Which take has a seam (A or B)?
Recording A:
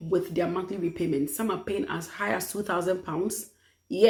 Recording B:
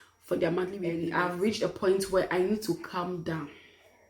B